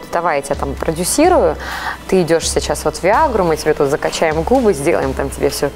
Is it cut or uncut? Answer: uncut